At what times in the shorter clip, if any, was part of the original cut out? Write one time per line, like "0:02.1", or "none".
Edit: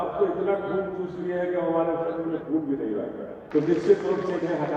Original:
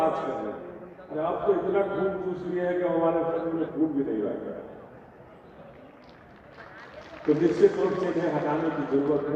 0:03.3